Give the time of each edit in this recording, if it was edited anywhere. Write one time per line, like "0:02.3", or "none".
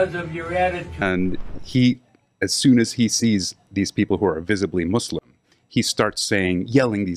0:01.0